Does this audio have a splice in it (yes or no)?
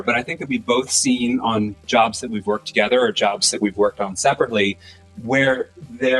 no